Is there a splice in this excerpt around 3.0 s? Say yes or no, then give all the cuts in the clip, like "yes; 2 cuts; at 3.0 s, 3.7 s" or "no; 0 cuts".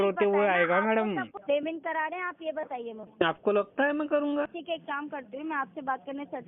yes; 3 cuts; at 1.3 s, 3.0 s, 4.5 s